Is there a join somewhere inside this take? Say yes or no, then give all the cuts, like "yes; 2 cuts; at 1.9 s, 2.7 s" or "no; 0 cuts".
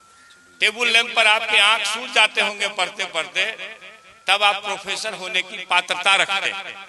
no; 0 cuts